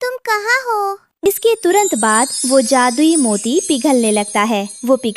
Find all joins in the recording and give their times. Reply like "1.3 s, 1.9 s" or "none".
1.0 s